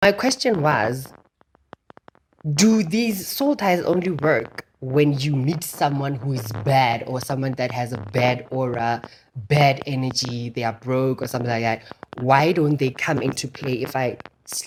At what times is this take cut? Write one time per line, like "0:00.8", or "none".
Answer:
none